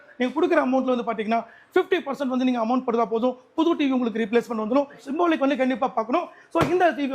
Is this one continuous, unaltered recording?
no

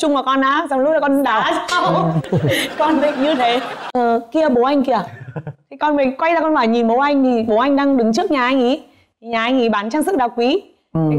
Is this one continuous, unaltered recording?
no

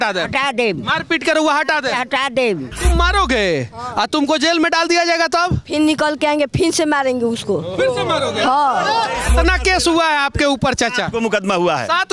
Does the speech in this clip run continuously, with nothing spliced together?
no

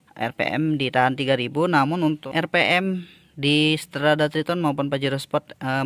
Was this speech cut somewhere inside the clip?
yes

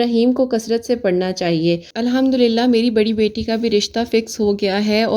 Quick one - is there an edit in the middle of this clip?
yes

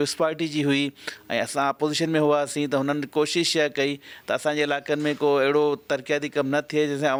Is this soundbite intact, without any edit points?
yes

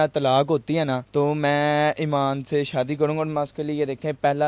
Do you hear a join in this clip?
yes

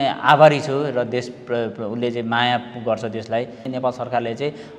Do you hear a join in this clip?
yes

